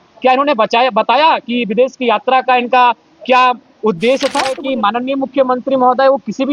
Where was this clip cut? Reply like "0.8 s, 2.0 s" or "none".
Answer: 4.6 s